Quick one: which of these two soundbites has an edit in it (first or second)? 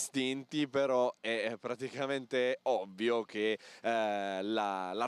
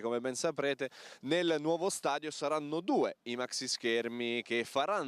first